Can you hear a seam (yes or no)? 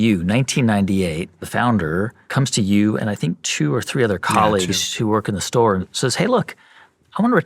yes